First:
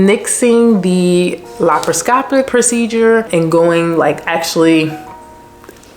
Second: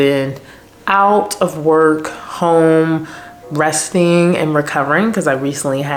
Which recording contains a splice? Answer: first; 2 cuts; at 2.5 s, 3.3 s

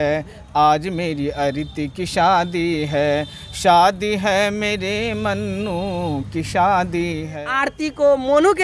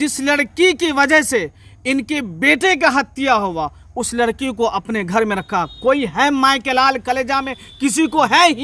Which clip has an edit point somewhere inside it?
first; 1 cut; at 7.3 s

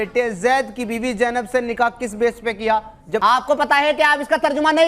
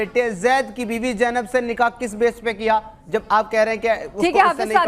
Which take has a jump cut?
first; 1 cut; at 3.2 s

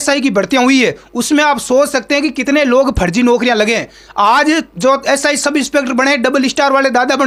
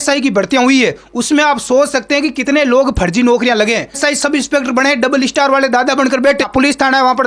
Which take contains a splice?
second; 2 cuts; at 4.0 s, 6.4 s

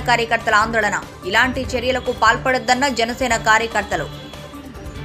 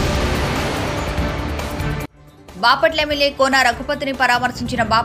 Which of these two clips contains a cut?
second; 1 cut; at 2.1 s

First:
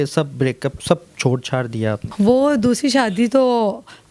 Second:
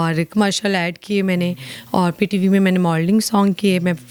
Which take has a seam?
first; 1 cut; at 2.0 s

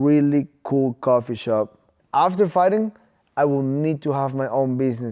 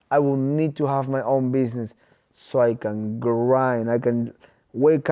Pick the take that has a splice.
first; 1 cut; at 1.9 s

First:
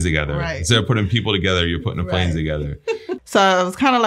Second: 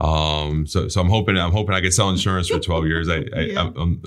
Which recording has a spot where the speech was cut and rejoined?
first; 1 cut; at 3.1 s

